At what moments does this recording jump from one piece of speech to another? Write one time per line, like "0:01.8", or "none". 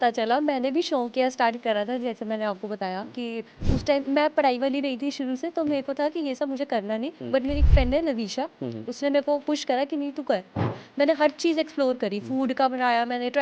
0:10.7